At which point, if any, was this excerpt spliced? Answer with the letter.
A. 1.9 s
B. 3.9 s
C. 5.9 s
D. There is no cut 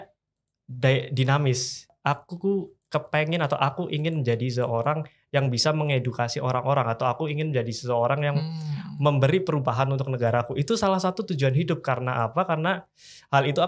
A